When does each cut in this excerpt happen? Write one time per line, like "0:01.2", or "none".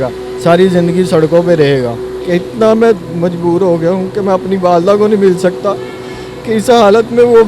0:02.1